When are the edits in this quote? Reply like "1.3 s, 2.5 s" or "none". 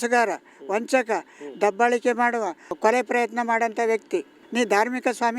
2.7 s, 4.4 s